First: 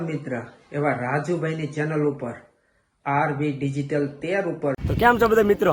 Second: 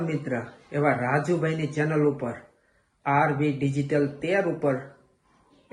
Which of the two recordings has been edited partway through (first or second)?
first